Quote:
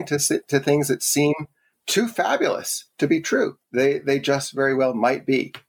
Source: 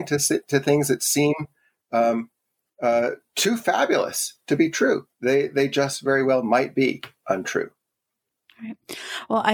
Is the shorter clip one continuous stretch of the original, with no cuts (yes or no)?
no